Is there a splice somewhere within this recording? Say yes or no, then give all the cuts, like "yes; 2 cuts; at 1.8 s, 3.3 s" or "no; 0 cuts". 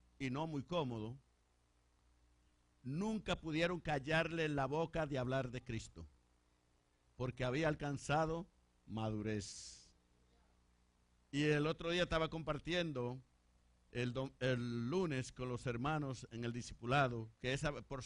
yes; 1 cut; at 15.6 s